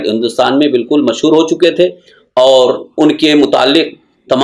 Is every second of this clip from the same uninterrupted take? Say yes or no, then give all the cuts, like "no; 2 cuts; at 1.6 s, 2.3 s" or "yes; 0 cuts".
yes; 0 cuts